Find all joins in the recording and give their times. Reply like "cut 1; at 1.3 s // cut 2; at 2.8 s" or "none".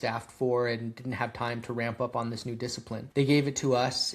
cut 1; at 3.0 s

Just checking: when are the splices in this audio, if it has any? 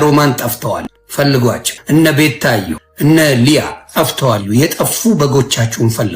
cut 1; at 1.0 s // cut 2; at 1.7 s // cut 3; at 2.8 s

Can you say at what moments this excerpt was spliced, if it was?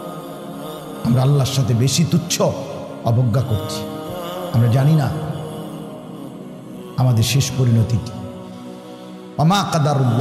cut 1; at 0.8 s // cut 2; at 5.1 s // cut 3; at 6.9 s // cut 4; at 8.0 s // cut 5; at 9.3 s

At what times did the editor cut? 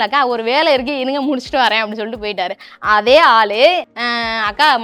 cut 1; at 3.9 s

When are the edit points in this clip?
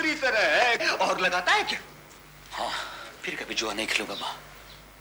cut 1; at 3.1 s

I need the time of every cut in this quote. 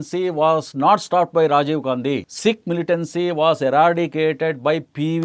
cut 1; at 2.3 s

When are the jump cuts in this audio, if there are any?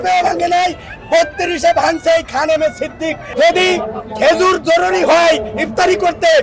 cut 1; at 3.2 s

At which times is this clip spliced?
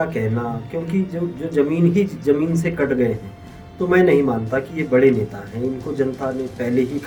none

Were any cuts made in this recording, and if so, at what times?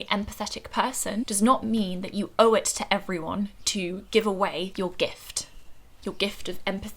cut 1; at 1.3 s // cut 2; at 4.7 s

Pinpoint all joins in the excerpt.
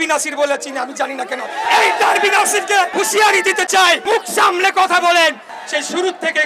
cut 1; at 1.7 s // cut 2; at 2.9 s // cut 3; at 4.0 s // cut 4; at 5.5 s

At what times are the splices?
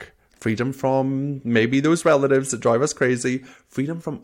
none

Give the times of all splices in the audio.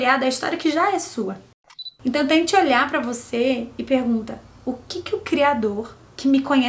cut 1; at 1.5 s

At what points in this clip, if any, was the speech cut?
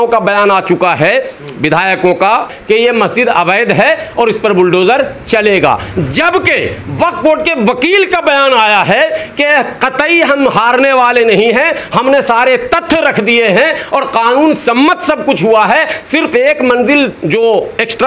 none

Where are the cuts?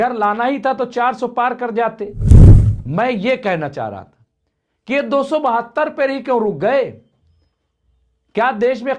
none

